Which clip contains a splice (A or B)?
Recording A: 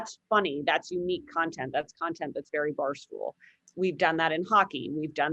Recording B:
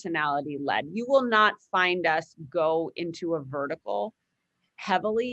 A